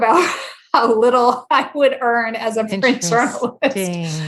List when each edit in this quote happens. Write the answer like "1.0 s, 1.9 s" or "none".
none